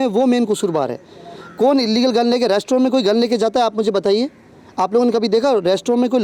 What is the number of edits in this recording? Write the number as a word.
zero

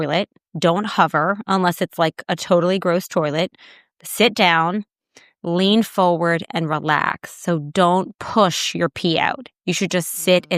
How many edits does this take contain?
zero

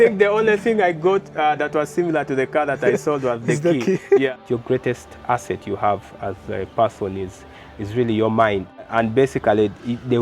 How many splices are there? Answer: two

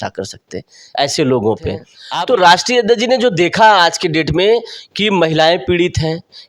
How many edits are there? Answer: one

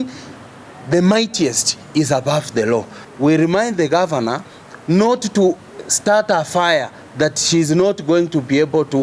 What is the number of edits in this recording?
one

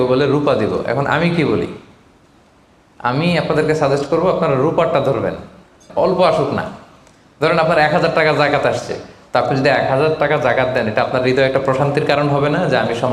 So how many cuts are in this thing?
one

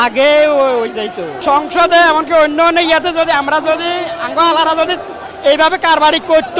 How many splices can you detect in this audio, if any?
one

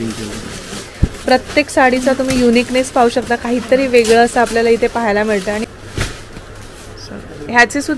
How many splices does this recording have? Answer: one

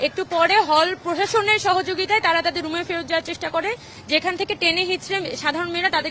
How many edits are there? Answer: zero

